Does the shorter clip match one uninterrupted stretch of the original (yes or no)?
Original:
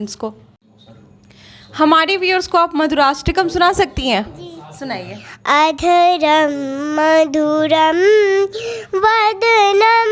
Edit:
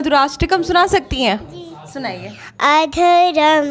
yes